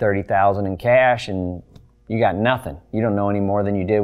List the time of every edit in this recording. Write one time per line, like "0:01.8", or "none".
none